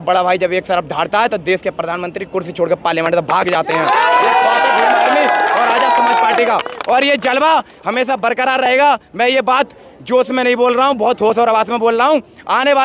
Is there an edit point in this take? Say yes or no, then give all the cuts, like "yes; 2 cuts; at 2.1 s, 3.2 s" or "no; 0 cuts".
no; 0 cuts